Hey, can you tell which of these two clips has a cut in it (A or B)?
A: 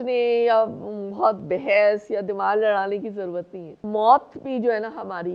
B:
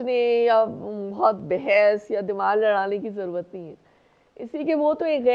A